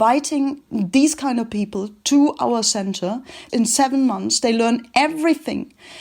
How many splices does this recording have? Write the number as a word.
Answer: one